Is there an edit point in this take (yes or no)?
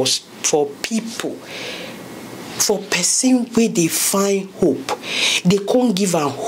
no